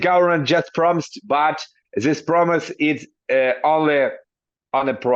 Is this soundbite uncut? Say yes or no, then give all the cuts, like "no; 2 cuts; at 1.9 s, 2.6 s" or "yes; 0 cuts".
yes; 0 cuts